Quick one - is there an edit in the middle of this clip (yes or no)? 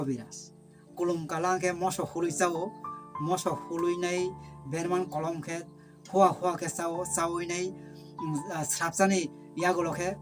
no